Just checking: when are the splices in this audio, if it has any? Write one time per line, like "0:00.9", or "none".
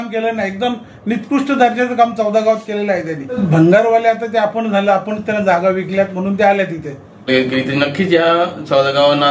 0:03.4
0:07.3